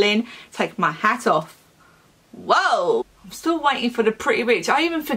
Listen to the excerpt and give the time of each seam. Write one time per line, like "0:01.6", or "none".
0:03.0